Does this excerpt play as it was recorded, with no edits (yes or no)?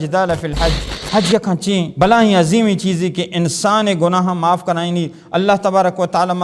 no